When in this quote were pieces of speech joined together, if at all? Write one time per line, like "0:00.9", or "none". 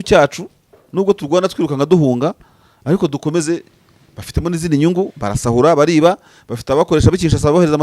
none